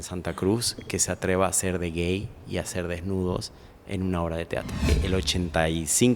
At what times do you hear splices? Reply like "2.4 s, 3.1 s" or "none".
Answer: 4.9 s